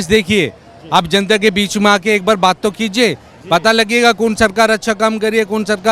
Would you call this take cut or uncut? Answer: uncut